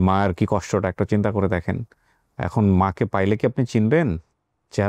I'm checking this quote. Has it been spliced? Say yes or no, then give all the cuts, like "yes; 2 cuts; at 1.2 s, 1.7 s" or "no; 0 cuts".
no; 0 cuts